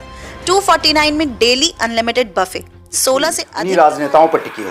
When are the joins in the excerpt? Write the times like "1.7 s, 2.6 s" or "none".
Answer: 3.5 s